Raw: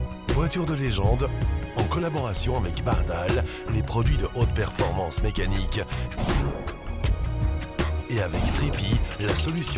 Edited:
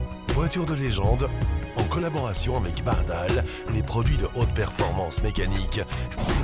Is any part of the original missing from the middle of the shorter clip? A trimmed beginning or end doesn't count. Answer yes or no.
no